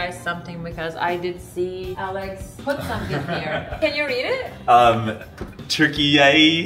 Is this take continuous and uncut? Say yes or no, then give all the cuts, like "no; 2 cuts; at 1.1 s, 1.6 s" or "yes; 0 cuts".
no; 2 cuts; at 2.2 s, 3.8 s